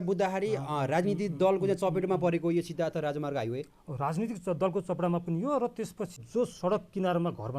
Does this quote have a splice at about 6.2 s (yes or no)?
yes